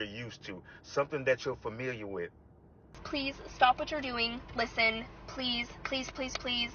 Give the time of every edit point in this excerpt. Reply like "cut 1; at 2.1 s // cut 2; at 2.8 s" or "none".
cut 1; at 2.9 s